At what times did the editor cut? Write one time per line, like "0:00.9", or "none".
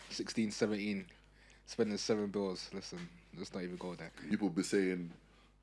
0:04.1